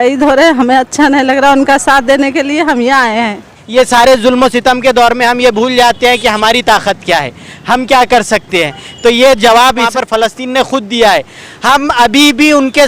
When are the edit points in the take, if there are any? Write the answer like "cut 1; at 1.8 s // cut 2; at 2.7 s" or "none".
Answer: cut 1; at 3.5 s // cut 2; at 9.8 s